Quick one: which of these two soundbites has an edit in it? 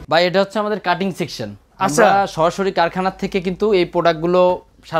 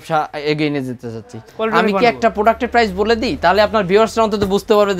second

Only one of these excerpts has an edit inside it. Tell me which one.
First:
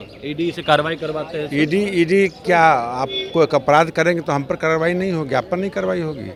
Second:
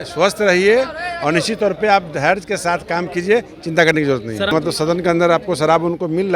second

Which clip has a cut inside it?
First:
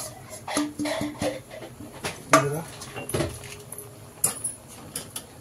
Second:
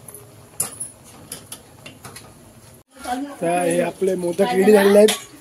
second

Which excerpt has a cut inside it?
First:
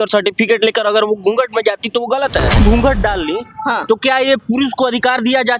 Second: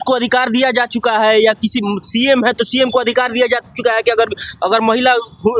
first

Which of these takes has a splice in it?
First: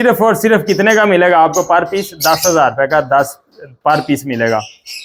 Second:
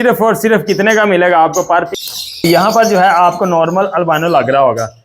second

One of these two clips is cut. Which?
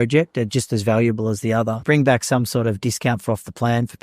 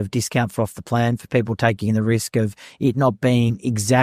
first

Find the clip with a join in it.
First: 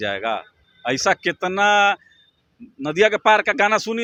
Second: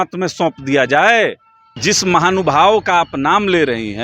second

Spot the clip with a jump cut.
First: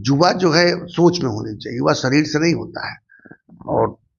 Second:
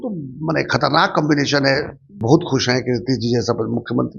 second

